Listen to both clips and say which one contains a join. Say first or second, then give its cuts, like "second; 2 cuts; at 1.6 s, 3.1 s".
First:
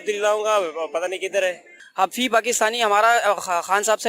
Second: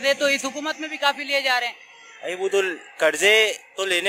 first; 1 cut; at 1.8 s